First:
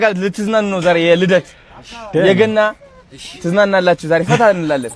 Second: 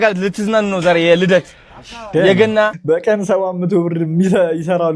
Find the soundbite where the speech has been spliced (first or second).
second